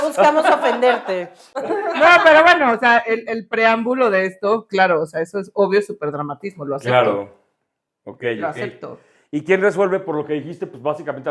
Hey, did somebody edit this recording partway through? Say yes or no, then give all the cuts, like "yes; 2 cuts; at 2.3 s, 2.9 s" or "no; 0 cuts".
no; 0 cuts